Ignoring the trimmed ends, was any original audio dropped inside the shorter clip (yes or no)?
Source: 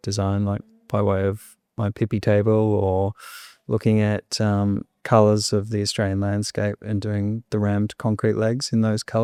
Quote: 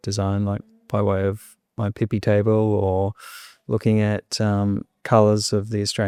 no